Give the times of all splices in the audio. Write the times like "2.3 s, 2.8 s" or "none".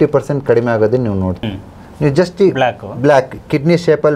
1.4 s